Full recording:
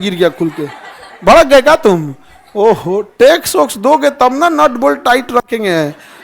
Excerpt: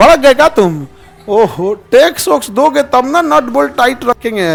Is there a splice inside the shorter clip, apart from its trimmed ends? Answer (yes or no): no